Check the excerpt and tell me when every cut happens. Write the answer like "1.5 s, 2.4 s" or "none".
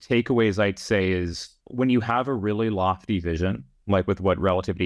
1.6 s, 3.7 s

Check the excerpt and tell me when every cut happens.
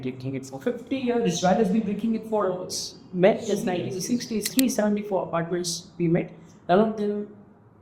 4.5 s

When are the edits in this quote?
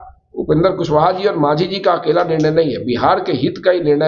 none

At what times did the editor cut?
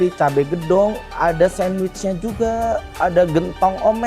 2.9 s

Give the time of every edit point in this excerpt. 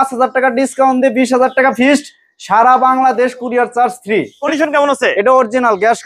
4.4 s

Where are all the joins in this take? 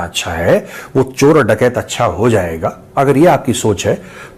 none

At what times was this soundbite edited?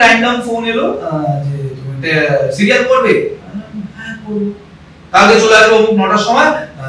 none

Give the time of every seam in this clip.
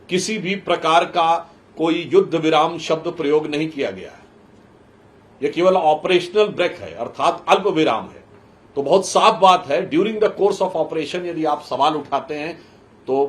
none

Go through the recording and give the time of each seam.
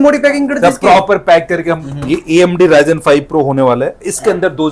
1.9 s

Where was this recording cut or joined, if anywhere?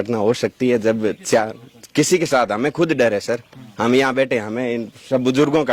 none

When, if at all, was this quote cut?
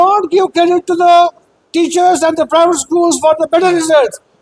none

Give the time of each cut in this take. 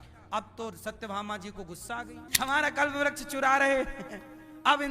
2.3 s

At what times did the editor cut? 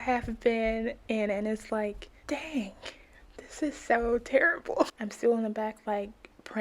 2.1 s, 5.0 s

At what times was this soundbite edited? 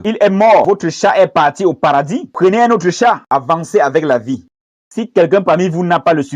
3.3 s, 4.4 s

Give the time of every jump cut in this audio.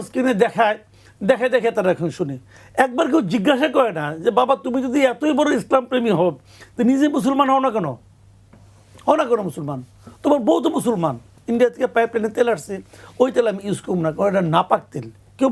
11.4 s

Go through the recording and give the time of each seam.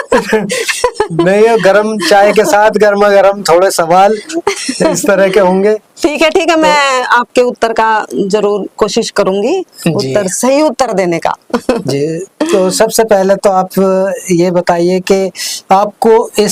none

